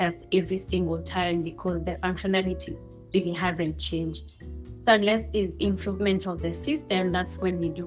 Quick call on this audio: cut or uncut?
uncut